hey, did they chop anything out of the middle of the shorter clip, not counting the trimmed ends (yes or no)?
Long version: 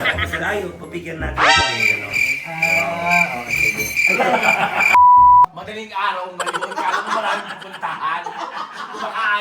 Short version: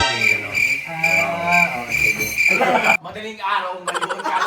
yes